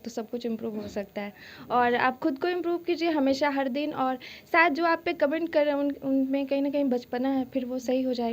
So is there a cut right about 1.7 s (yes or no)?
no